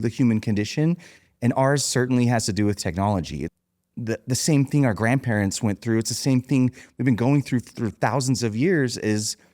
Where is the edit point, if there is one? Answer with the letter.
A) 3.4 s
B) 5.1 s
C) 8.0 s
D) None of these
A